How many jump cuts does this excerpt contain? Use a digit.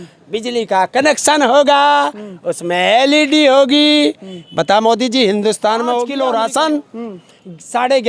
1